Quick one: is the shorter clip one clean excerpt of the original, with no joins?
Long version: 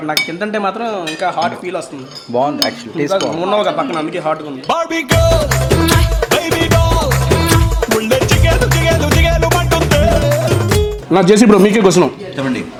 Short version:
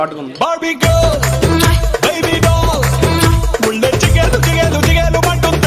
yes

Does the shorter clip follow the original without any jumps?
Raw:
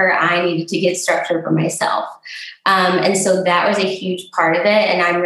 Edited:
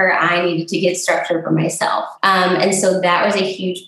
no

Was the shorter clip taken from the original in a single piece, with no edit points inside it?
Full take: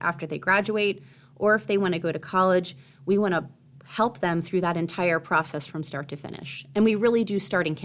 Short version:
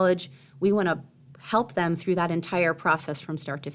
yes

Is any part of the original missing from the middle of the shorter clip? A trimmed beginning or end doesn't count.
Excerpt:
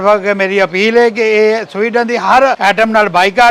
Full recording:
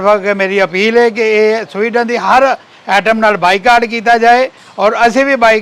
yes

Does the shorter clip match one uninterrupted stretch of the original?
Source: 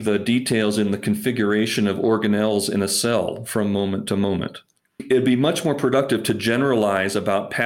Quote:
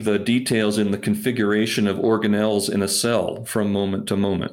yes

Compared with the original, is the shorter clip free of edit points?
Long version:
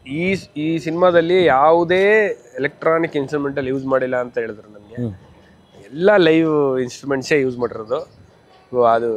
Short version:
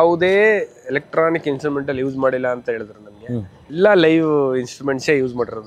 no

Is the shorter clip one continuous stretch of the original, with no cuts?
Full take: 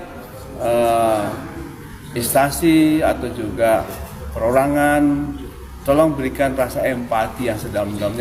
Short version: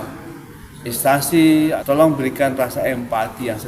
no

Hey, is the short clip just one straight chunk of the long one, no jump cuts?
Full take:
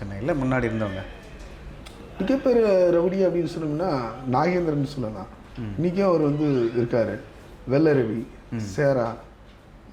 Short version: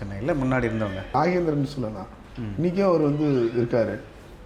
no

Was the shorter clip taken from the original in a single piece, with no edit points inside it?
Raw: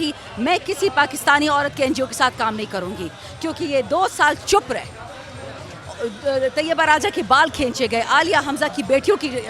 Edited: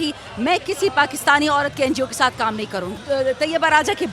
no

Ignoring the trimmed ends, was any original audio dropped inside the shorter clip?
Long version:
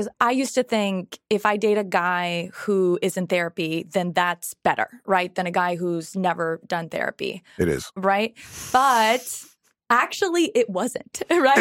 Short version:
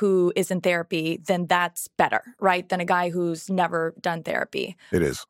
no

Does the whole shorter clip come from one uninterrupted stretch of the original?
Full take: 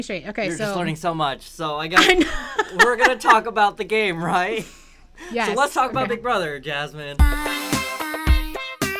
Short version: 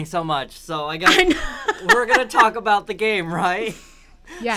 yes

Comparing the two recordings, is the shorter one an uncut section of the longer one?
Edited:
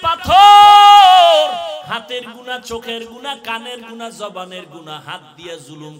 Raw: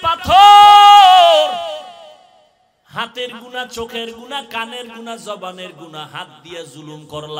no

